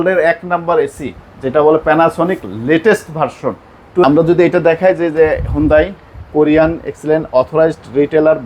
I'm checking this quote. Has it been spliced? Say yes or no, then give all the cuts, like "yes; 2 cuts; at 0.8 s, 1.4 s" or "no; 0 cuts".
yes; 1 cut; at 4.0 s